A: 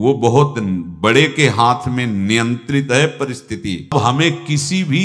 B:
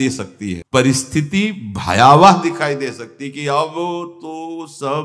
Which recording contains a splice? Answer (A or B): A